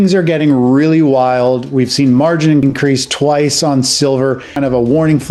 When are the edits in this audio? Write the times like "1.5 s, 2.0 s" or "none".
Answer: 2.6 s, 4.5 s

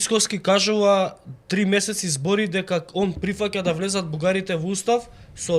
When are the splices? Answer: none

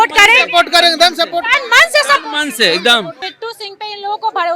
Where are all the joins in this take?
3.2 s

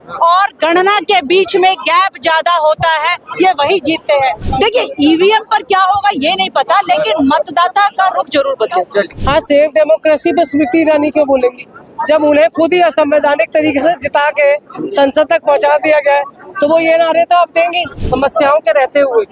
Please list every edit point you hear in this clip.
4.4 s, 9.2 s, 18.0 s

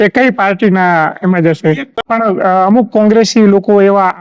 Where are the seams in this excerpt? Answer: 1.9 s

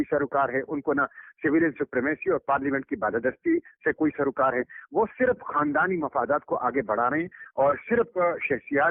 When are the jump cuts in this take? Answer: none

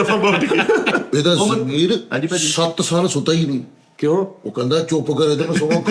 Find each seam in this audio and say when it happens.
1.1 s

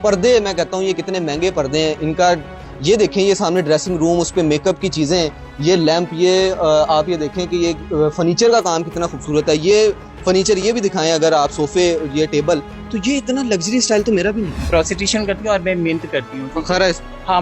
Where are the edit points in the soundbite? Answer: 14.7 s

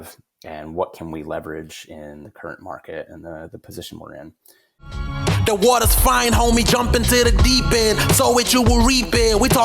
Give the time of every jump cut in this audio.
4.7 s

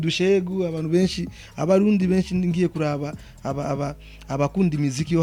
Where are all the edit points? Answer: none

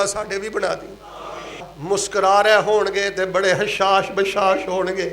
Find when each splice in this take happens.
1.7 s

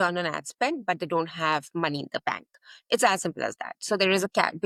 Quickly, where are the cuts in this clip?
none

